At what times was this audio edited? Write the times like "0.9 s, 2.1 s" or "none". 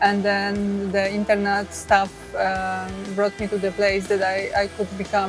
none